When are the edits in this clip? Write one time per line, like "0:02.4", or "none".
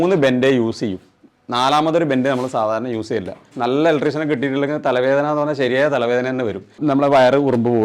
0:03.5
0:06.8